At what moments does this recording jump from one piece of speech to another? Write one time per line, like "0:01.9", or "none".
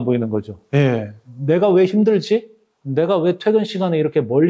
none